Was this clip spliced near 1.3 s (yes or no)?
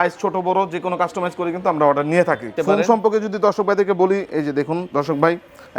no